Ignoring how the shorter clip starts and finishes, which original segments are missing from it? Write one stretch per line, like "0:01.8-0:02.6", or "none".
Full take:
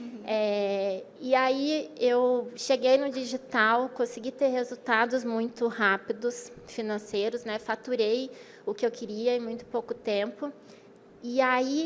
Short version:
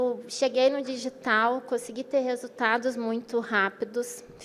none